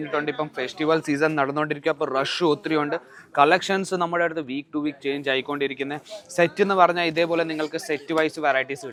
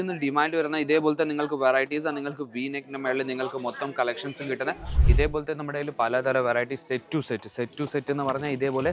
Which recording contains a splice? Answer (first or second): second